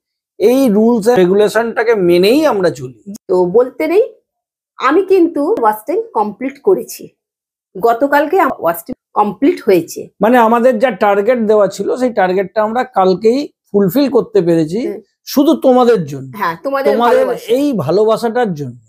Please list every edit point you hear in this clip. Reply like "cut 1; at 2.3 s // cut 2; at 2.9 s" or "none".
cut 1; at 1.2 s // cut 2; at 2.9 s // cut 3; at 5.6 s // cut 4; at 8.5 s